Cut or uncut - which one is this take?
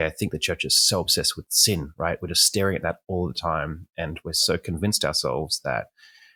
uncut